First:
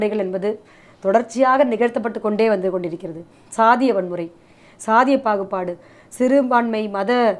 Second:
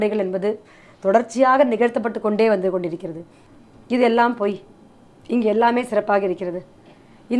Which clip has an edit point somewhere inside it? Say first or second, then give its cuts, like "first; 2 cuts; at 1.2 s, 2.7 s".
second; 1 cut; at 3.4 s